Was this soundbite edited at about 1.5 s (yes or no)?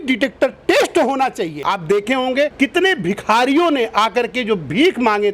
yes